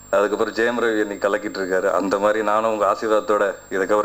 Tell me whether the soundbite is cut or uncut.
uncut